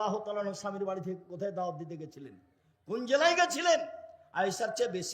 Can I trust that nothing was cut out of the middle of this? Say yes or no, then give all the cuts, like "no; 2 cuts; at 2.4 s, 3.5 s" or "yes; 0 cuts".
yes; 0 cuts